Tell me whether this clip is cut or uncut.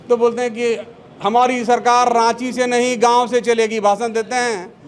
uncut